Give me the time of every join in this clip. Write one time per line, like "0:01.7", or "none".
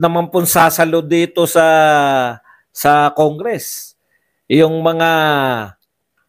none